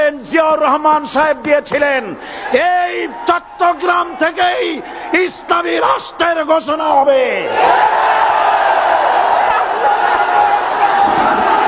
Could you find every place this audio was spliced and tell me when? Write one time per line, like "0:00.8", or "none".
none